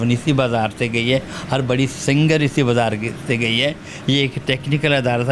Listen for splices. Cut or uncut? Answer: uncut